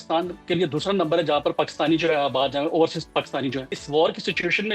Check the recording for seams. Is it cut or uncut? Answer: cut